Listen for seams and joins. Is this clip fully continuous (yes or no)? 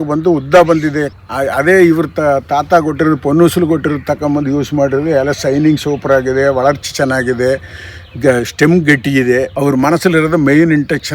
no